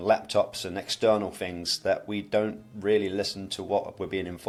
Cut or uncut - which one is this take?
uncut